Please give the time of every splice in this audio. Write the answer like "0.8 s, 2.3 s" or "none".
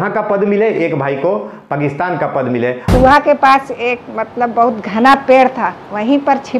2.9 s